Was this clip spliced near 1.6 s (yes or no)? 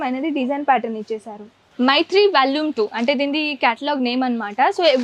yes